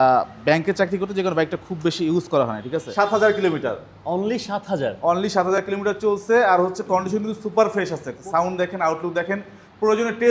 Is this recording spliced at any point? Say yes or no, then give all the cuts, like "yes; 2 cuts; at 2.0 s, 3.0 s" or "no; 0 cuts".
yes; 2 cuts; at 2.9 s, 8.4 s